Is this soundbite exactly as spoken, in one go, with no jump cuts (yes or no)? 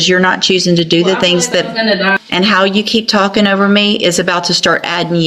no